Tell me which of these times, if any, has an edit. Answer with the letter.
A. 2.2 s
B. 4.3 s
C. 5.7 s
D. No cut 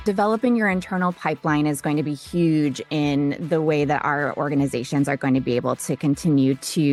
D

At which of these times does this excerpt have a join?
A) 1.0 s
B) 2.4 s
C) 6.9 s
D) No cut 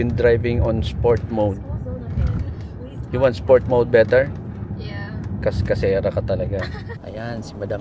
C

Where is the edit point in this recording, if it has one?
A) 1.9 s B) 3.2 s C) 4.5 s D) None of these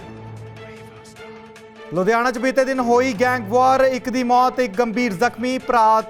A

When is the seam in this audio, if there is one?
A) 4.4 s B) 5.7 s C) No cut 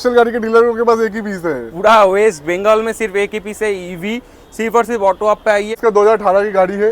B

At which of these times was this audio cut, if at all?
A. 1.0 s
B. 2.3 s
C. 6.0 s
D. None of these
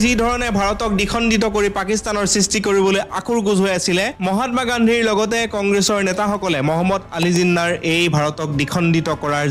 D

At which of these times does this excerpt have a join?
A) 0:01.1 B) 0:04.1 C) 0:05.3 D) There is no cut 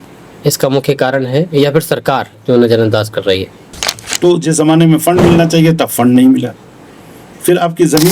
B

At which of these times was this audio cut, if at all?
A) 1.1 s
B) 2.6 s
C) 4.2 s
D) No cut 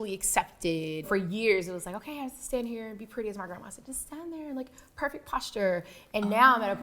A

